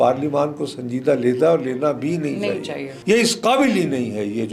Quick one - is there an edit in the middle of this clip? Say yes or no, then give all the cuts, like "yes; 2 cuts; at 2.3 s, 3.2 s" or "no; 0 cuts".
yes; 1 cut; at 2.9 s